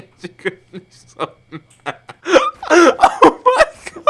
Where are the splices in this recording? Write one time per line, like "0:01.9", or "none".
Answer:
0:02.1